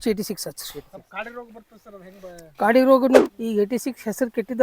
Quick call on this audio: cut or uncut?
cut